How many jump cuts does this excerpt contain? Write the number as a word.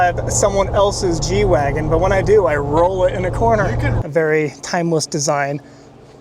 one